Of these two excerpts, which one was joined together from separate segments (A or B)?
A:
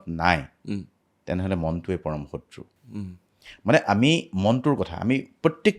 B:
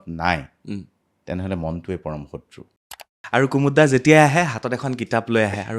B